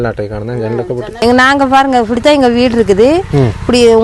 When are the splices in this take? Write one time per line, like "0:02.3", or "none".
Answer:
0:01.1